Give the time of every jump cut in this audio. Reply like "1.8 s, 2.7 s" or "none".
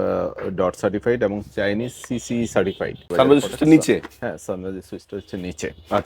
3.1 s

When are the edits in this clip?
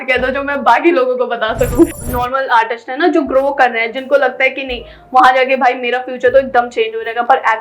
2.0 s

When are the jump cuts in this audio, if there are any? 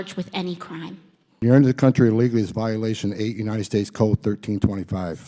1.4 s

